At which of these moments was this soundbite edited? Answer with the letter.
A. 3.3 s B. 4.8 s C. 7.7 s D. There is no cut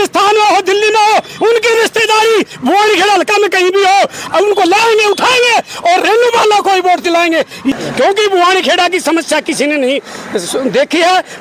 C